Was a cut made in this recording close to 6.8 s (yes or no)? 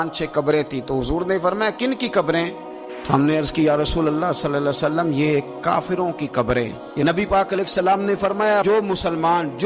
yes